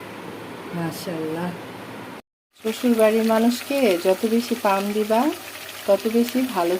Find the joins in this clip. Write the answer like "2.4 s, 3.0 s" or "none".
2.4 s

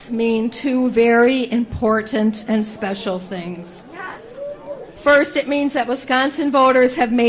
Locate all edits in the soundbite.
none

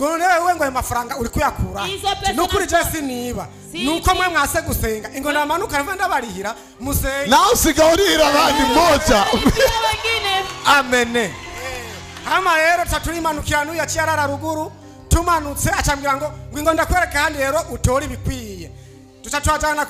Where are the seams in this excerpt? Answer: none

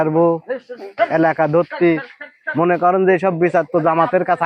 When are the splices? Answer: none

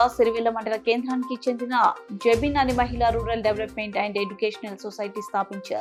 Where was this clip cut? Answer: none

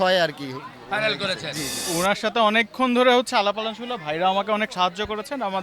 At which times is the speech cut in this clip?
1.8 s

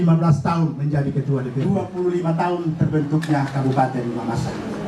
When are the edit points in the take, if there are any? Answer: 1.7 s

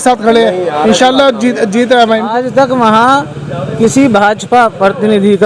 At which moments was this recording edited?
2.3 s

